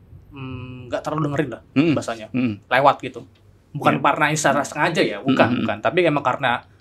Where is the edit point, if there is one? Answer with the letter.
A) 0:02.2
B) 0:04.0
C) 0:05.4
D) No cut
D